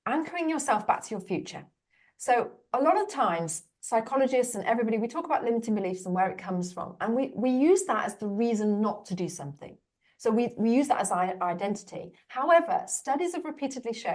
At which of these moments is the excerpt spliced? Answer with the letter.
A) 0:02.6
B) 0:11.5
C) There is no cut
A